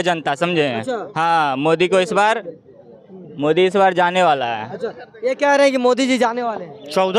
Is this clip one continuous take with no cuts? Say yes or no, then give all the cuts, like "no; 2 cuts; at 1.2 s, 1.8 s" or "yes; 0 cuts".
yes; 0 cuts